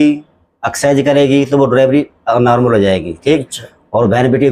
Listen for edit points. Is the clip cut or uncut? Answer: uncut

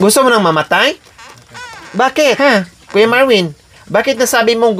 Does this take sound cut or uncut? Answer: cut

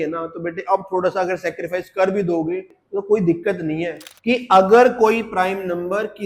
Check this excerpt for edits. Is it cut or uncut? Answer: cut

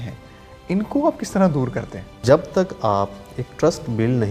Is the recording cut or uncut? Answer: cut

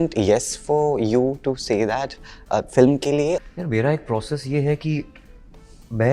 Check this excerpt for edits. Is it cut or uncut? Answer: cut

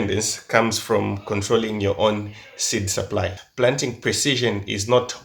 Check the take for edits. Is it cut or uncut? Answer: cut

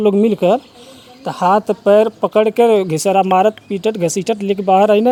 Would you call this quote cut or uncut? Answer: uncut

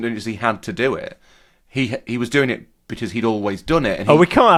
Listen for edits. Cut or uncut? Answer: uncut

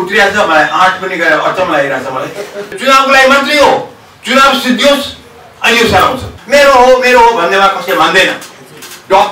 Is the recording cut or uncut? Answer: cut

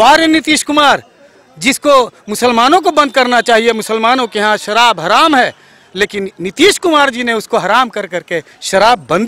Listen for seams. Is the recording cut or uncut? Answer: uncut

